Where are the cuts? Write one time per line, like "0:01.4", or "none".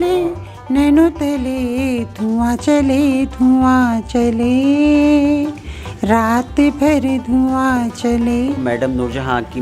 0:08.6